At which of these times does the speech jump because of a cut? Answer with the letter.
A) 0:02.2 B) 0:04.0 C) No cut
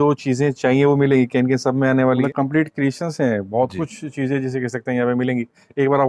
A